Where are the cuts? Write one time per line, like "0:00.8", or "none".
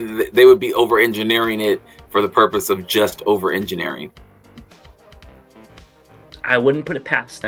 none